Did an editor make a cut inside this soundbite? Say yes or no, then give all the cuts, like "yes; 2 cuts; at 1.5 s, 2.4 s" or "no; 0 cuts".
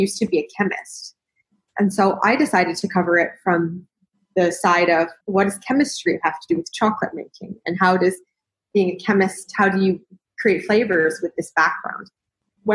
yes; 1 cut; at 5.2 s